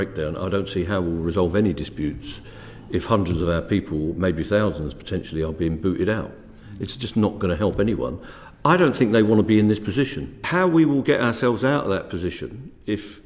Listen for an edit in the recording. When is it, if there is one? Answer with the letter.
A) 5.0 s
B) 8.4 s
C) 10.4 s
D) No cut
C